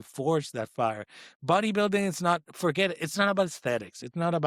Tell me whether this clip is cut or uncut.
uncut